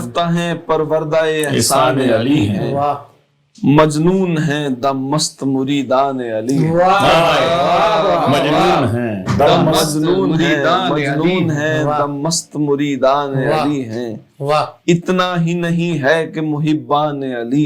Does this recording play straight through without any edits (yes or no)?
yes